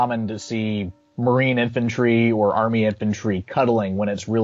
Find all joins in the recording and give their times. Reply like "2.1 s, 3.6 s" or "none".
1.0 s

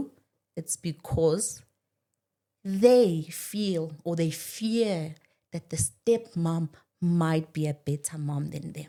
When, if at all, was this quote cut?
none

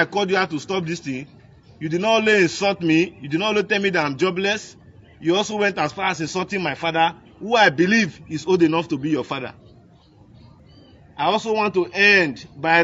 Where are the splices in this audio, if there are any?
10.6 s

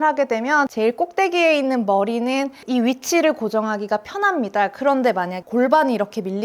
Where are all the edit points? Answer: 5.4 s

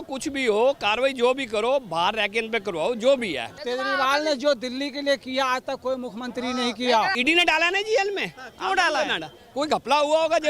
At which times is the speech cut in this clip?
3.6 s, 7.1 s

